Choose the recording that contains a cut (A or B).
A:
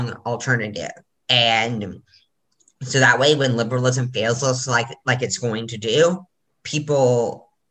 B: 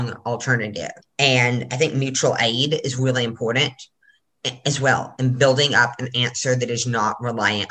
B